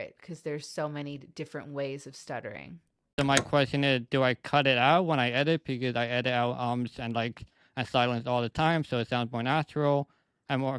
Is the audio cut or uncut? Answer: cut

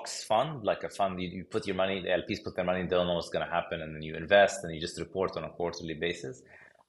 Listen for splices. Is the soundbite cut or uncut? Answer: uncut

